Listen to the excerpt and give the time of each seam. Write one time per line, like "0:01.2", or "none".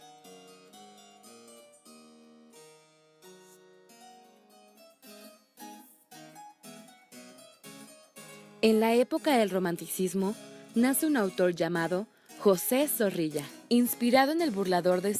0:07.4

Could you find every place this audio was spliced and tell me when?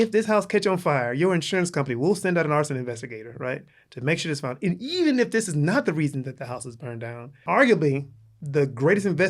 0:07.4

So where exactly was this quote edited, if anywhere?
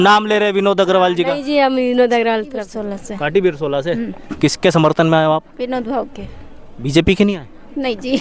0:02.7

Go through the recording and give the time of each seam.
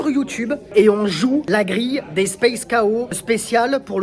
none

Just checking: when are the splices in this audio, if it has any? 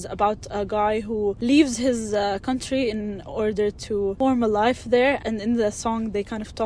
0:01.4
0:04.2
0:05.2

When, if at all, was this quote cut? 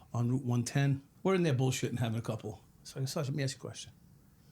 0:01.1
0:02.7

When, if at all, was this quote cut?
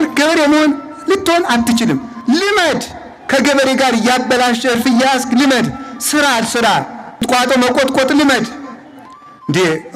0:02.1
0:07.2

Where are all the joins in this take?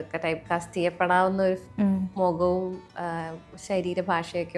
none

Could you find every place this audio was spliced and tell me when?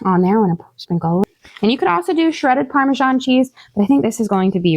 0:01.2

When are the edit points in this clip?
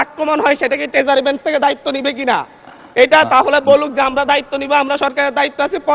none

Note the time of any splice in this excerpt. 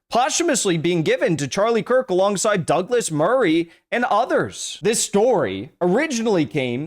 0:04.6

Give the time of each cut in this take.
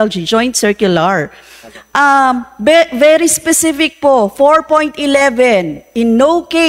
none

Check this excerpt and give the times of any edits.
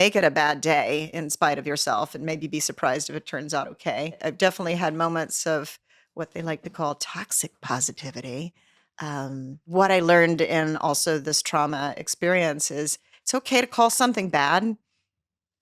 0:04.2
0:09.6

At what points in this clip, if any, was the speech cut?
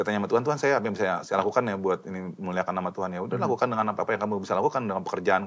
none

